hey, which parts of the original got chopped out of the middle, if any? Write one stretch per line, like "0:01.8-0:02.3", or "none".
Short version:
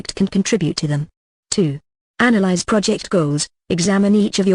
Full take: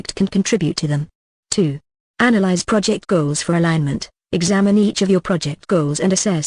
0:03.1-0:03.7